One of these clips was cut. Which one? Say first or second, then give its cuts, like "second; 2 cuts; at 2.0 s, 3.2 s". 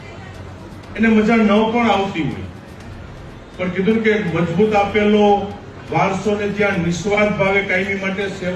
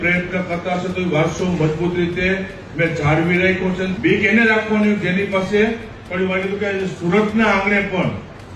second; 1 cut; at 3.9 s